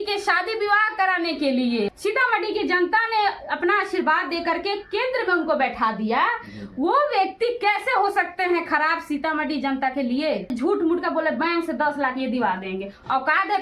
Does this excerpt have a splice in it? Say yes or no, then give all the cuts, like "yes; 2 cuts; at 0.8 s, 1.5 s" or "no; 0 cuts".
yes; 2 cuts; at 1.9 s, 10.5 s